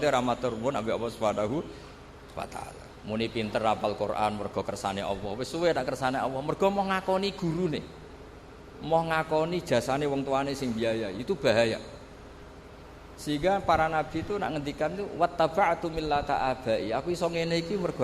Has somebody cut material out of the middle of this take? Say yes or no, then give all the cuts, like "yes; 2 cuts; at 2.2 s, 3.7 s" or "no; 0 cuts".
yes; 1 cut; at 2.9 s